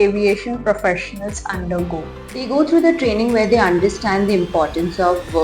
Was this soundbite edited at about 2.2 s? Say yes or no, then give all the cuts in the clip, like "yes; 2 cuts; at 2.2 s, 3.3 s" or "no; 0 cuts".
yes; 1 cut; at 2.2 s